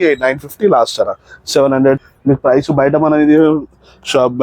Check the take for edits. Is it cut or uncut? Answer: cut